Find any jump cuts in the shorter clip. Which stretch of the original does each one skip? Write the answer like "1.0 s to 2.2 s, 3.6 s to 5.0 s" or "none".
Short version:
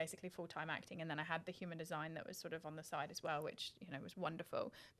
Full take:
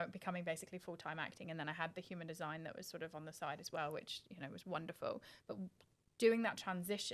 none